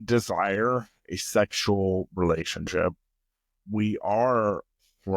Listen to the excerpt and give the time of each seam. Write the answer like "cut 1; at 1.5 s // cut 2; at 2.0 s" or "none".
none